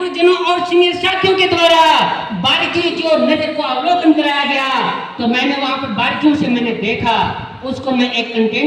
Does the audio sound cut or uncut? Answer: uncut